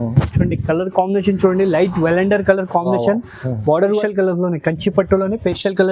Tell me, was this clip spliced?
yes; 1 cut; at 4.0 s

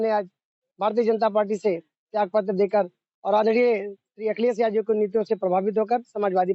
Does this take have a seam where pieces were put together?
no; 0 cuts

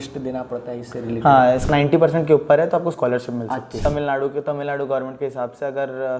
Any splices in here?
yes; 2 cuts; at 1.7 s, 3.8 s

